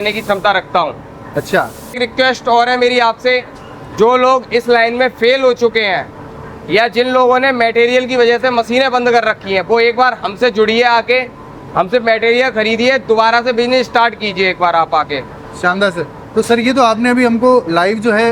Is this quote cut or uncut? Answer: uncut